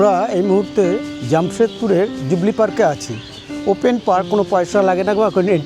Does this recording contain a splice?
no; 0 cuts

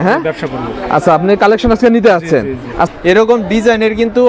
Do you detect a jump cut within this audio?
yes; 1 cut; at 2.9 s

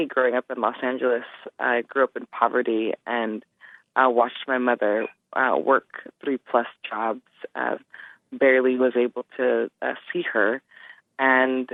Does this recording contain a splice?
no; 0 cuts

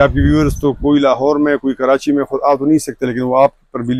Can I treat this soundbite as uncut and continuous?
yes; 0 cuts

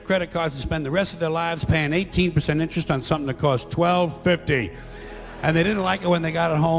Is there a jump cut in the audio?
no; 0 cuts

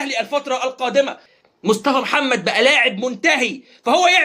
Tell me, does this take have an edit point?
yes; 1 cut; at 1.4 s

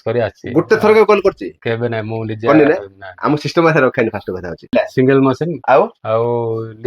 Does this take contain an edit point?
yes; 1 cut; at 4.7 s

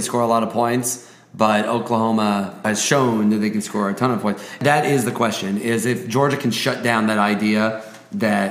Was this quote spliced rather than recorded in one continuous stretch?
yes; 2 cuts; at 2.6 s, 4.6 s

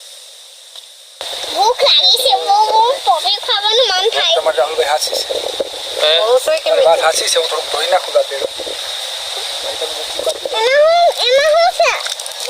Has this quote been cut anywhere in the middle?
yes; 1 cut; at 1.2 s

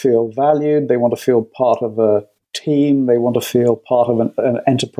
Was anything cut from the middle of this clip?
no; 0 cuts

